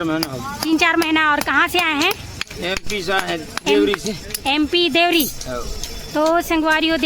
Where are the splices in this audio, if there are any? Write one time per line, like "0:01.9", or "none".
none